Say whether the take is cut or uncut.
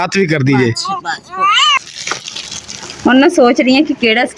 cut